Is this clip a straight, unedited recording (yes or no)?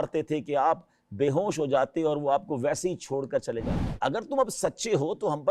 no